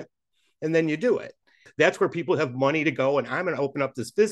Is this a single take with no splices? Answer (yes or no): no